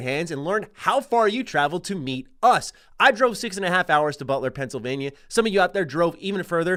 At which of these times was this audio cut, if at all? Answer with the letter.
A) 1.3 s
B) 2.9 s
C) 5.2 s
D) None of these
D